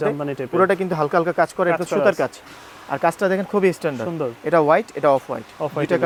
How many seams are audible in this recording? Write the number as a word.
zero